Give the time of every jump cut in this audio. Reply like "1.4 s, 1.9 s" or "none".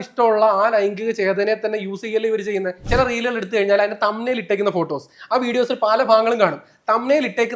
2.8 s